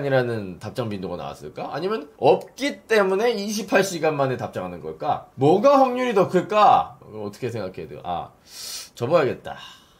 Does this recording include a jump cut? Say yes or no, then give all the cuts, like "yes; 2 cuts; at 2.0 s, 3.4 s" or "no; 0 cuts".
yes; 1 cut; at 7.0 s